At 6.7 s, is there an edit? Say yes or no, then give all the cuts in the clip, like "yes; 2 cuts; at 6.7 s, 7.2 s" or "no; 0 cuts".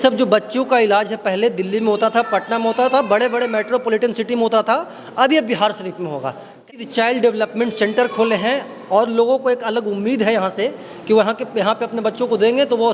yes; 1 cut; at 6.7 s